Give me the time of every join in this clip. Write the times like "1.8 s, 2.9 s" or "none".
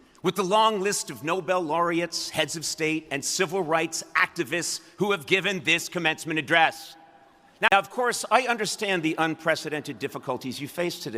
7.7 s